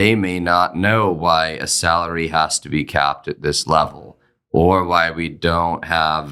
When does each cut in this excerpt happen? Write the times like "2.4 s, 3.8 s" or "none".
none